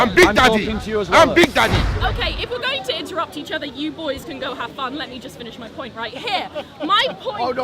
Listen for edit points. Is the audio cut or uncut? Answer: cut